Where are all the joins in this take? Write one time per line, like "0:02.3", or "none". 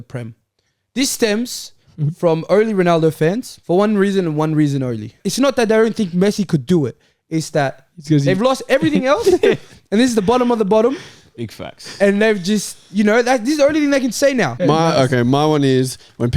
0:03.5
0:05.2
0:14.5